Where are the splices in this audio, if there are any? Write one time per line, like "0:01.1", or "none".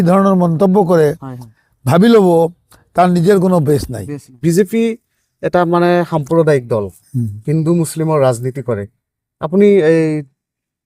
0:04.3